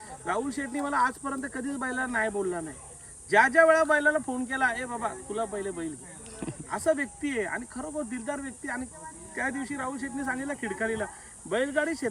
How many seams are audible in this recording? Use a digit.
0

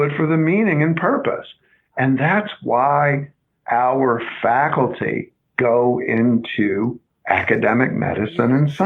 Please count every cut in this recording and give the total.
2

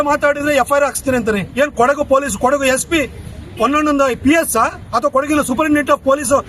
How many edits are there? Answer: 0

